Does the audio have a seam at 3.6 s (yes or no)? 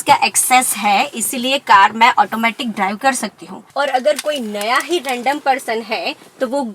yes